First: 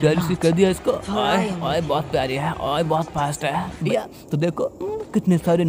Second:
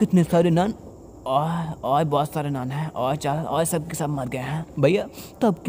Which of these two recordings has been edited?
first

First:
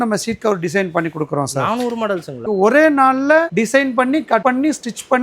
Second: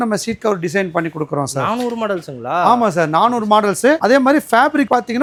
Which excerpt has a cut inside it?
first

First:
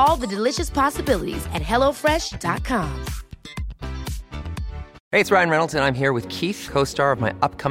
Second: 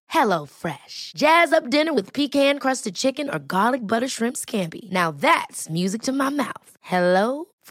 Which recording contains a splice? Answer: first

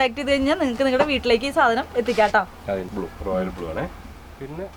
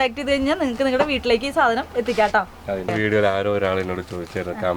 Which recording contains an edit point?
second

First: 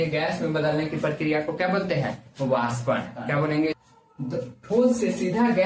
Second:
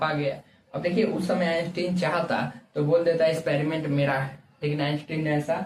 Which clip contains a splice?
first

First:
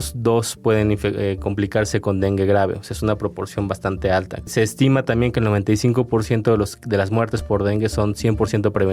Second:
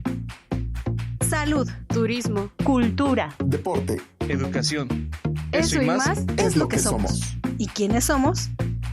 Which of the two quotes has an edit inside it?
first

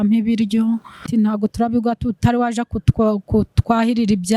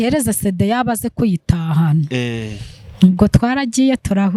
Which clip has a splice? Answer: first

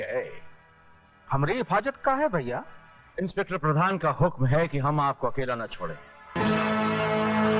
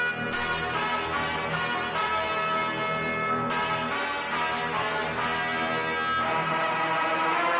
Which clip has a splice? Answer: first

